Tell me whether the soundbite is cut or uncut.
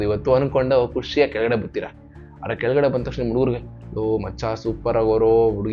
uncut